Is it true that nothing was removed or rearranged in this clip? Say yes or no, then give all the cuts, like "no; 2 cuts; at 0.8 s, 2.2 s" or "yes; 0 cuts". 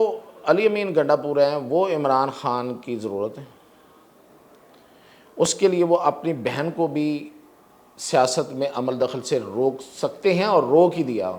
yes; 0 cuts